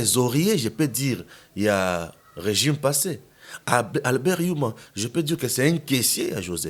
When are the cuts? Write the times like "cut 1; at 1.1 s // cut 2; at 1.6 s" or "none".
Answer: none